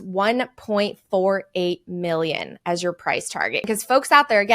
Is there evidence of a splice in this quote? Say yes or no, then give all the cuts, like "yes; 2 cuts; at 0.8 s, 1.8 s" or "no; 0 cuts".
yes; 1 cut; at 3.7 s